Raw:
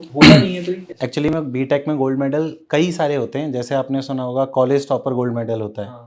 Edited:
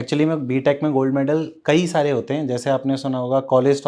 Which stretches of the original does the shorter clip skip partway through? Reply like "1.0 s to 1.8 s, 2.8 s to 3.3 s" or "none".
none